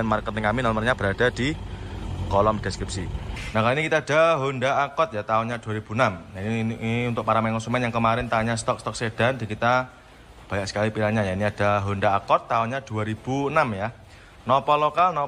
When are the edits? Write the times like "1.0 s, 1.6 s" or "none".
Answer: 3.4 s